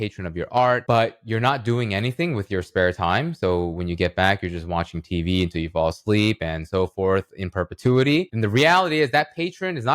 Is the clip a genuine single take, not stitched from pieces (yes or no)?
no